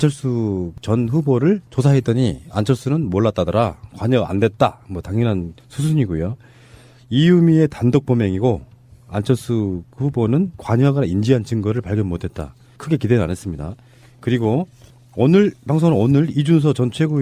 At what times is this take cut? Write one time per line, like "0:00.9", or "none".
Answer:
none